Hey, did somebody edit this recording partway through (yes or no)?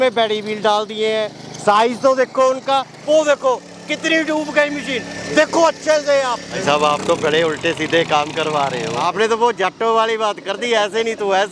yes